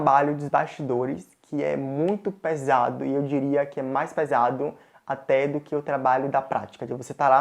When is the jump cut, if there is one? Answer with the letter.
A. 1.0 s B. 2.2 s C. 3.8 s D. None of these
D